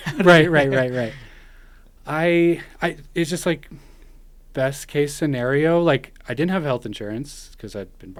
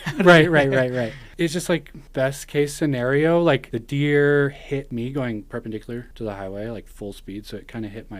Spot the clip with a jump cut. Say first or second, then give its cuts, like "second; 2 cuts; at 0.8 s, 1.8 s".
second; 5 cuts; at 1.3 s, 2.0 s, 3.7 s, 4.9 s, 6.1 s